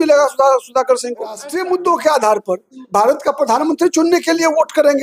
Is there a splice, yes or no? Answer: yes